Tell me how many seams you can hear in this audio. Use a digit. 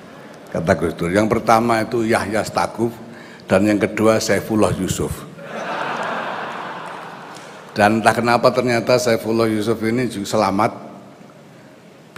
1